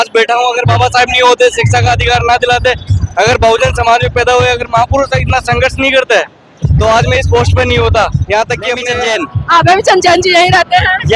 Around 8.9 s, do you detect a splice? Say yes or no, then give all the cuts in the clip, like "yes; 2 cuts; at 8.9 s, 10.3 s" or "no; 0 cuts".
yes; 1 cut; at 8.9 s